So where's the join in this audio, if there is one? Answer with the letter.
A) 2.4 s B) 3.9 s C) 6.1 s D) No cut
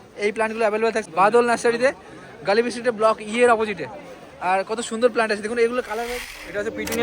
C